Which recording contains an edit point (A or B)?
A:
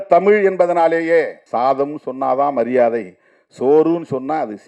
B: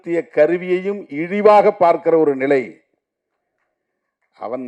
A